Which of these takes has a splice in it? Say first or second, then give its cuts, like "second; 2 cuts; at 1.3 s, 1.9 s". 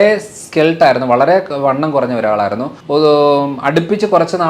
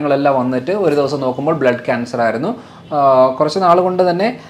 first; 1 cut; at 2.7 s